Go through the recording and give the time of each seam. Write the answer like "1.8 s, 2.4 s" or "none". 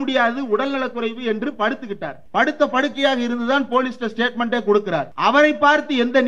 2.1 s, 5.1 s